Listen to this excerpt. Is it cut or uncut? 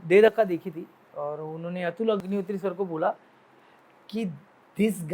cut